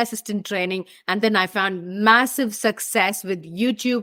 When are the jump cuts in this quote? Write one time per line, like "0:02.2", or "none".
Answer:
none